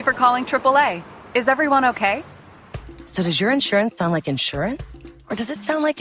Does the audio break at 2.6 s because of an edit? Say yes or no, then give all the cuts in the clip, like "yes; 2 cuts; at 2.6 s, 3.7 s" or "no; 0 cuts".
yes; 1 cut; at 2.6 s